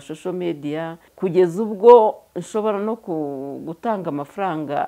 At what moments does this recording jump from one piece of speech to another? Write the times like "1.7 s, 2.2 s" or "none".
1.0 s